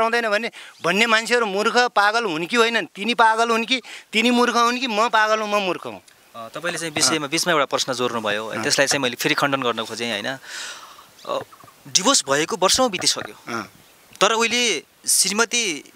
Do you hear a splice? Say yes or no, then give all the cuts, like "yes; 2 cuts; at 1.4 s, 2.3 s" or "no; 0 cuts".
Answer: no; 0 cuts